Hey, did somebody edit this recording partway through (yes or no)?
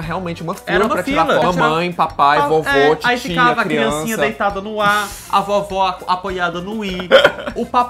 yes